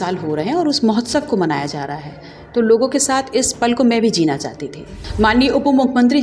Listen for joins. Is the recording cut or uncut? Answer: cut